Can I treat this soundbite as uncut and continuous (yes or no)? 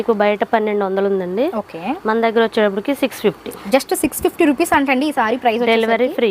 no